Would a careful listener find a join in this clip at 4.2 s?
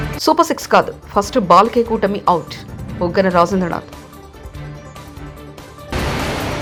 no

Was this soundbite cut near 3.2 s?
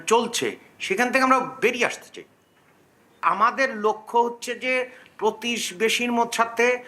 yes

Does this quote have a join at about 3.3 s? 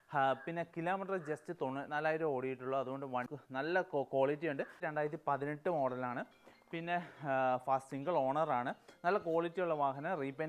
yes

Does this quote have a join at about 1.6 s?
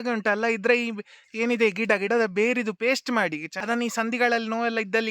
no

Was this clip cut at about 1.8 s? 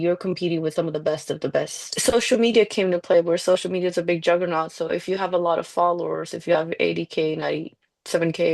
yes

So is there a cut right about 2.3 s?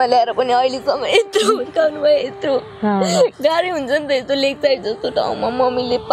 no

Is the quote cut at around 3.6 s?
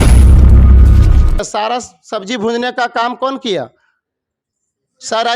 no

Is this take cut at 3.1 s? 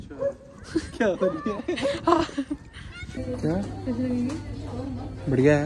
yes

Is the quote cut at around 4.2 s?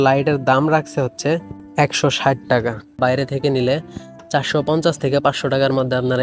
no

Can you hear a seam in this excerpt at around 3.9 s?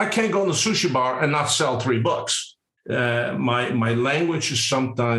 no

